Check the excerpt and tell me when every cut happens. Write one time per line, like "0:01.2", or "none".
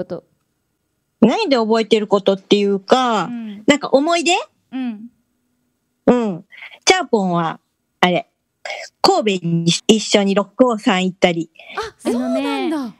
0:09.8

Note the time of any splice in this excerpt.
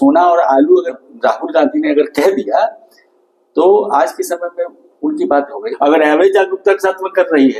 0:01.0
0:05.6

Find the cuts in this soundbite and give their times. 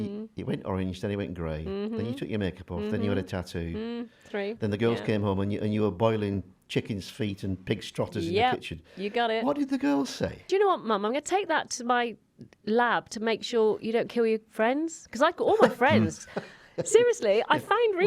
0:10.4

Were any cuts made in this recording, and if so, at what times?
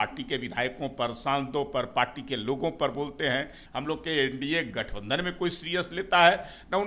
0:03.6

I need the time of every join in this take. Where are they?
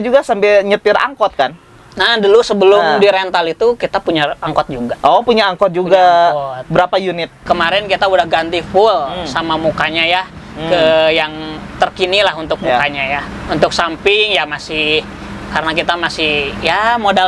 0:07.4

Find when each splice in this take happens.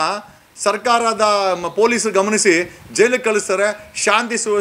none

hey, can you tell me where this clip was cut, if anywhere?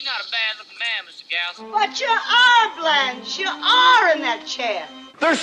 none

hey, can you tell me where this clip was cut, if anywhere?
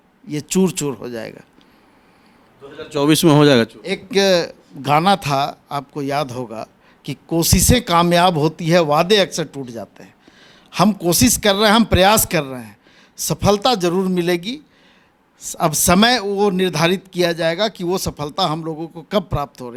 none

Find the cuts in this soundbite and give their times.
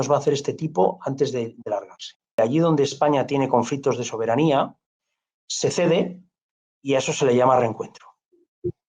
0:02.4

